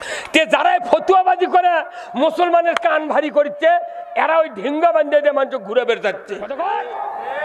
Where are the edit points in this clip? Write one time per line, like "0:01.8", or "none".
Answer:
0:06.5